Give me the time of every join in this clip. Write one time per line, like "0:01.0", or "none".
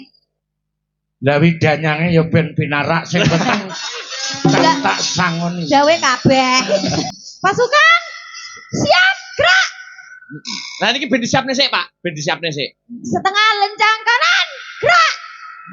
0:07.0

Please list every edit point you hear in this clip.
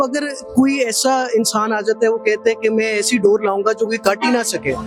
none

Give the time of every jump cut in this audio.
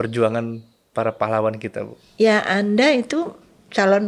0:02.0

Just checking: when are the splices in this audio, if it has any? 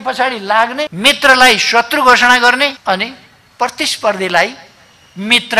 0:00.9
0:02.8

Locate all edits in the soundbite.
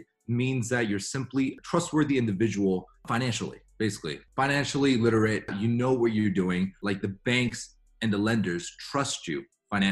0:01.6
0:03.0
0:04.2
0:05.5
0:06.8

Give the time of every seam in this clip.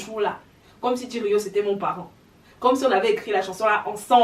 none

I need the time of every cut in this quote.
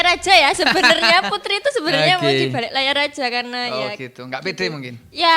none

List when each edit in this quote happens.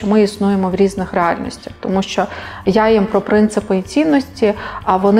none

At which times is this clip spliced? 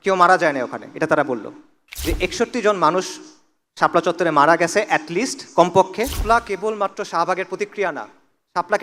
0:01.9
0:06.2

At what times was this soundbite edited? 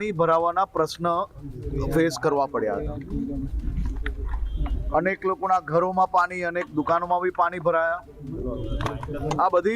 none

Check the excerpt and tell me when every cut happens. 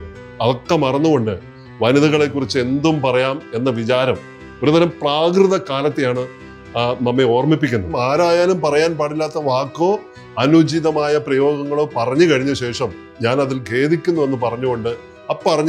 0:08.0
0:13.1

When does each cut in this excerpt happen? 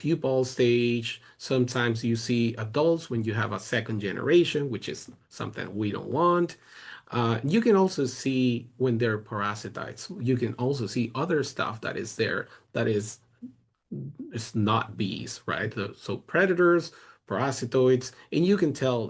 none

